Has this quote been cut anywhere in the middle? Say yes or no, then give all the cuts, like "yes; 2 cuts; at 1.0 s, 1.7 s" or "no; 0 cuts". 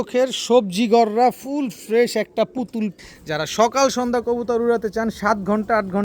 yes; 1 cut; at 2.9 s